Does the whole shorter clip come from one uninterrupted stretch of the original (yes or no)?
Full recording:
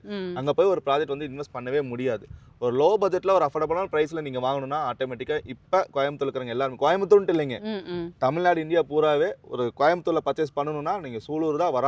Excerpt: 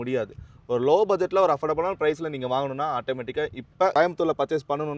no